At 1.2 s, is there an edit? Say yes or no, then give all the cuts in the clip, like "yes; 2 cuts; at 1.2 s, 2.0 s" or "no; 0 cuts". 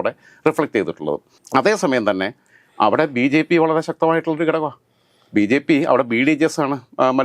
no; 0 cuts